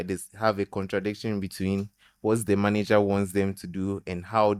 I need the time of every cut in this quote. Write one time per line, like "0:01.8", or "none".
none